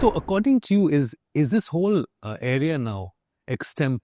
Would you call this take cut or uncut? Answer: cut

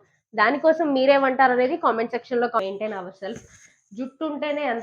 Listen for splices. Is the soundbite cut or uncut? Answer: cut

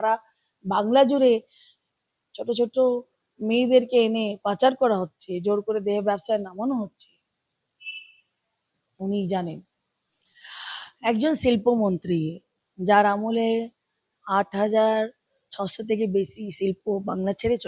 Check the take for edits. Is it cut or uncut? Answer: uncut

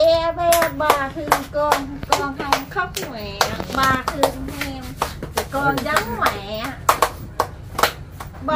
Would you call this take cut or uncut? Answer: uncut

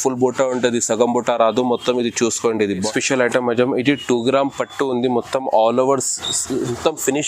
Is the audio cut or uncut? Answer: cut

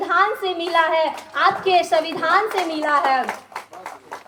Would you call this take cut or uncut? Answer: uncut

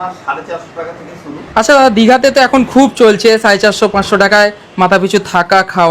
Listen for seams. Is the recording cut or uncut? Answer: cut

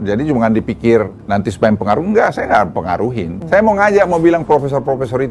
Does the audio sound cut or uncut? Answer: cut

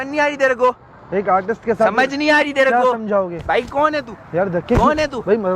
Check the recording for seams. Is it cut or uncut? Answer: uncut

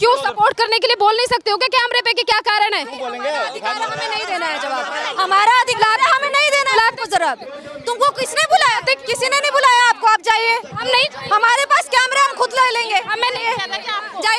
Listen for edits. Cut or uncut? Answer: uncut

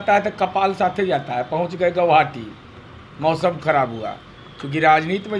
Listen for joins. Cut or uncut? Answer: uncut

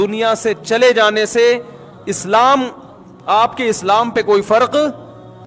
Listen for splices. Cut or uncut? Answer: uncut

